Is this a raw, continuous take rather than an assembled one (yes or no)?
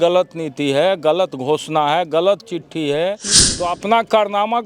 no